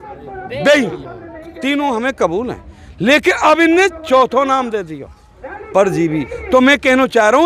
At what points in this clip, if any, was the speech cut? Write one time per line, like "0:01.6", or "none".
none